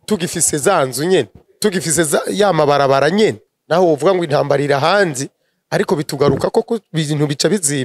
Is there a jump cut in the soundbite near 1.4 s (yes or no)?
yes